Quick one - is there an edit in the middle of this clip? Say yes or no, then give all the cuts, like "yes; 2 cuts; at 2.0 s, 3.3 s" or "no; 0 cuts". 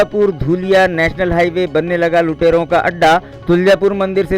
no; 0 cuts